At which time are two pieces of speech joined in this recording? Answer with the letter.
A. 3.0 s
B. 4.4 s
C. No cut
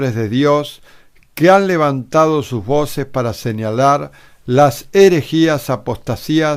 C